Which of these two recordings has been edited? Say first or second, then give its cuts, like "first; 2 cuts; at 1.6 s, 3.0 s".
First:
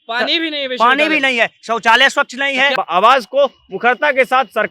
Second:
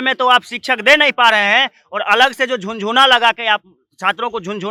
first; 1 cut; at 2.7 s